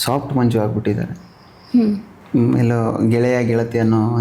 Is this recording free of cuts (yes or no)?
no